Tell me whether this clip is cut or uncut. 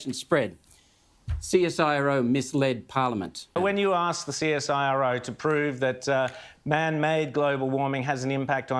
cut